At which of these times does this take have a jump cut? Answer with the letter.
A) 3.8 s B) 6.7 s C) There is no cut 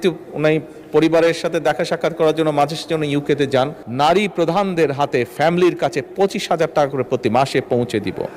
A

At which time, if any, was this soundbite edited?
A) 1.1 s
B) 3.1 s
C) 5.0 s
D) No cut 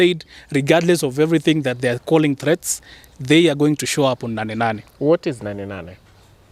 D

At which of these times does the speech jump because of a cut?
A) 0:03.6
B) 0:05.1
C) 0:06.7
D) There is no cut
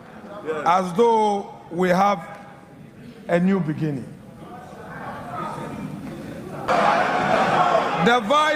C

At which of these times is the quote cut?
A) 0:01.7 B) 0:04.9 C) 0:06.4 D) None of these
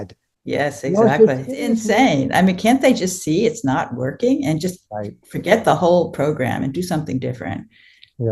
A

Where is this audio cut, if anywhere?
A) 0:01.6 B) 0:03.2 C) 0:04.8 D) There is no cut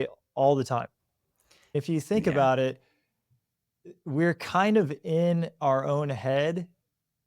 A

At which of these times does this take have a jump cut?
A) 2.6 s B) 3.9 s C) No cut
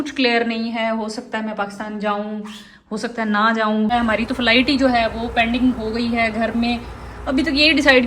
B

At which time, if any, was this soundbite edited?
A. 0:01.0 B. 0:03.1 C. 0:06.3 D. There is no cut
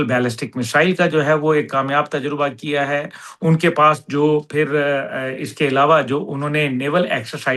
D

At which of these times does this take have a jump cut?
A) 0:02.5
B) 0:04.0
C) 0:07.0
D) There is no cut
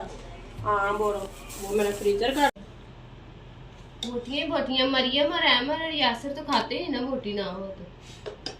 A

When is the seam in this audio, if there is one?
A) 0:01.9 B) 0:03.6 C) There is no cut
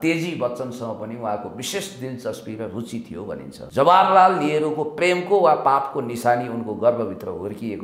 B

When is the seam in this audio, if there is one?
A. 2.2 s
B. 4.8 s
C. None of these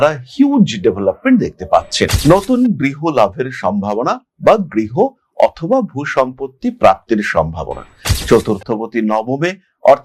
A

